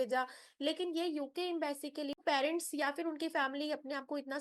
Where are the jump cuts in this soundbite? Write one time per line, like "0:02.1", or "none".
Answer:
0:02.2